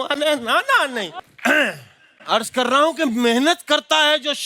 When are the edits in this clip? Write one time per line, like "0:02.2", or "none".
0:01.1